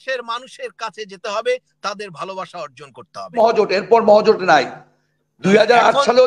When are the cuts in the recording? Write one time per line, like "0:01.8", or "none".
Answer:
0:03.4